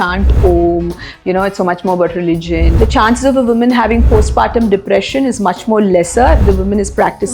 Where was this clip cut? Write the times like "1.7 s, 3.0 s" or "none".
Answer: 2.7 s